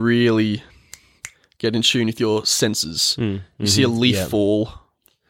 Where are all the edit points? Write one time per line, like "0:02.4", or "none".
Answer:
none